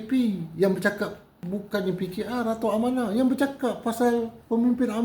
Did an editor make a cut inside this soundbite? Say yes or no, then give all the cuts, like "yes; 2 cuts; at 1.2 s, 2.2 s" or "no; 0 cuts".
yes; 1 cut; at 1.5 s